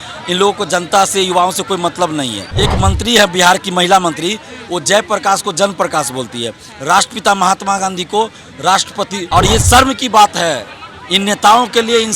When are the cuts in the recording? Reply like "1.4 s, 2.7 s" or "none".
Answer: 2.4 s, 9.2 s

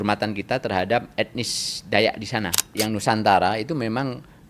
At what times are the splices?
2.7 s

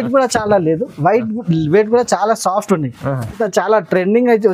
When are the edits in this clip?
3.4 s

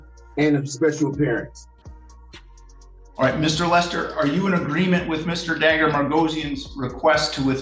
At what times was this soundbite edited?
none

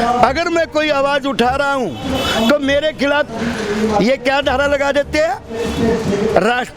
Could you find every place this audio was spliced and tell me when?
3.3 s

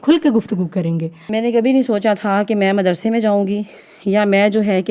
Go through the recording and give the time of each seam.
1.2 s

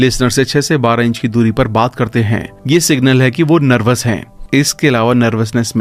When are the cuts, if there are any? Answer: none

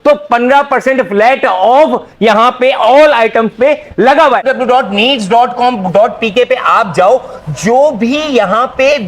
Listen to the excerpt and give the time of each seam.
4.4 s

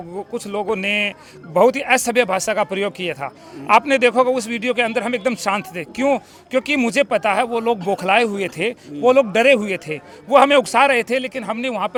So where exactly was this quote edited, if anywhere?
none

